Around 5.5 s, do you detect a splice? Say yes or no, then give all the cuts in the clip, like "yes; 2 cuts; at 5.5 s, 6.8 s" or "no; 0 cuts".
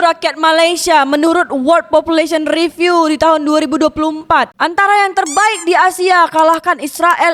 no; 0 cuts